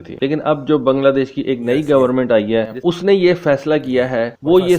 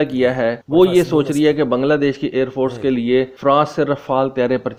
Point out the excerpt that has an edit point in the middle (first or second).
first